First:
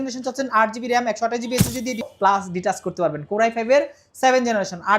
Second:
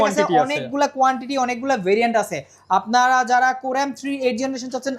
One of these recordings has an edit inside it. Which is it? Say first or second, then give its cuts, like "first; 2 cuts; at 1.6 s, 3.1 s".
first; 1 cut; at 2.0 s